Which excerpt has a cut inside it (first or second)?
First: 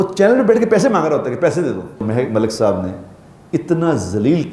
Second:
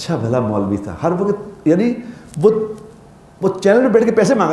first